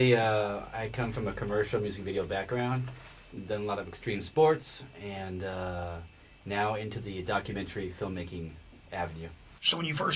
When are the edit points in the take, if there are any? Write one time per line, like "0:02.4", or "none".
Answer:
none